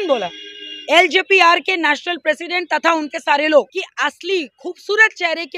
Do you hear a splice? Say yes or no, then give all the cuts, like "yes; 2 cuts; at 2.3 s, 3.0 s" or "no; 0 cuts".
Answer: yes; 1 cut; at 3.8 s